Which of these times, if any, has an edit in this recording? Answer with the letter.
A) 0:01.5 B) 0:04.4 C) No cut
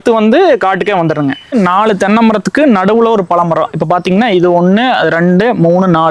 A